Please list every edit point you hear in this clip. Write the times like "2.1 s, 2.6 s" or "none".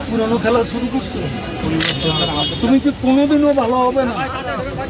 none